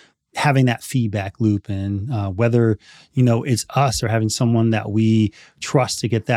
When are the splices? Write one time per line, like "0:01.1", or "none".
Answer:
none

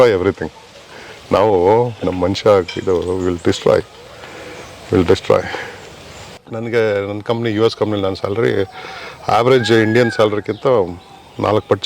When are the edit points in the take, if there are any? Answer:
0:06.3

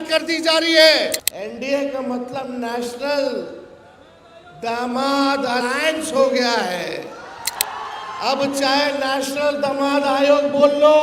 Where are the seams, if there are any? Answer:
0:01.3
0:07.6

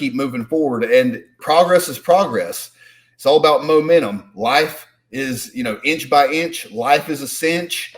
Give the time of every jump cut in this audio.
0:01.3

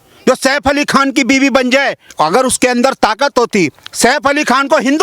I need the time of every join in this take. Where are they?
0:02.0

